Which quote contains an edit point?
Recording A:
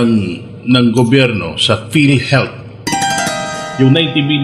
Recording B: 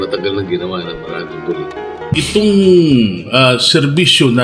B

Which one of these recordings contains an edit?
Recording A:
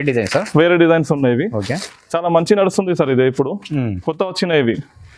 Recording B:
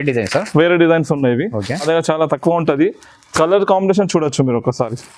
B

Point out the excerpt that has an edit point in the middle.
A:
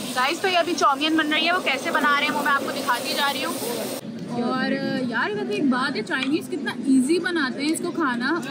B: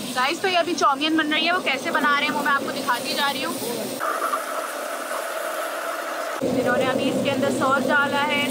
A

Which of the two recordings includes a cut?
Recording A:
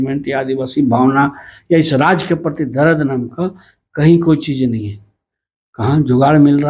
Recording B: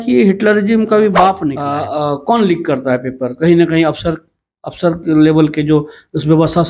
B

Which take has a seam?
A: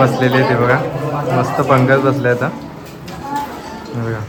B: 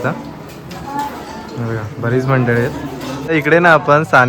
B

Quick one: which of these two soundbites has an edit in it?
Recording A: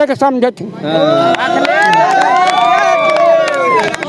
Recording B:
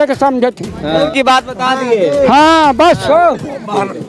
B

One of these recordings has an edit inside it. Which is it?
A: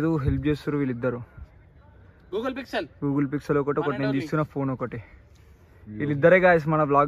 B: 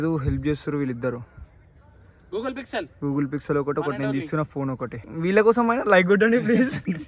B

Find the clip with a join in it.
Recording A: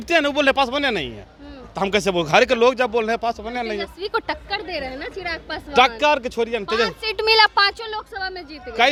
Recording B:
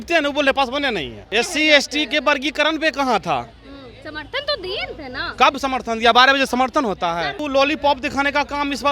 B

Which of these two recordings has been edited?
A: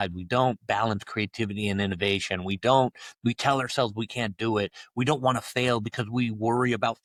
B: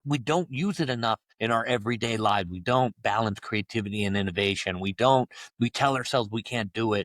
B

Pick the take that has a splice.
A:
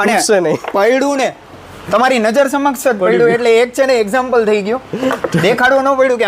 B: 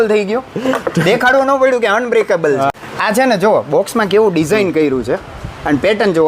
B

